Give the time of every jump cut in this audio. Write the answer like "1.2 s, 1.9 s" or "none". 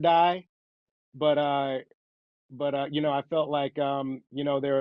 none